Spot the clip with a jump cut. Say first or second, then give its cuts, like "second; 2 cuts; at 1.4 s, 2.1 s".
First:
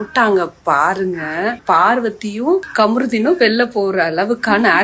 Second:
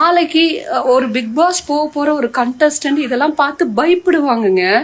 first; 2 cuts; at 1.6 s, 2.7 s